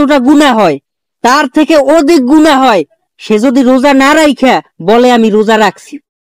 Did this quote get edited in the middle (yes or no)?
no